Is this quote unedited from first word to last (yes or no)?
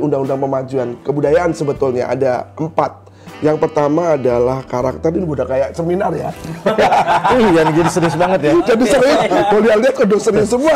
yes